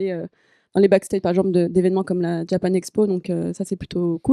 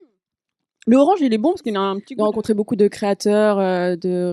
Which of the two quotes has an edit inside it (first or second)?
second